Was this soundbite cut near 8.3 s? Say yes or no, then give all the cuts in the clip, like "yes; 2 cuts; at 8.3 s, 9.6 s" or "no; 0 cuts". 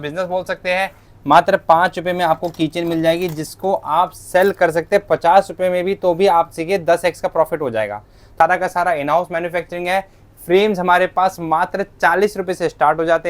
yes; 2 cuts; at 1.1 s, 8.3 s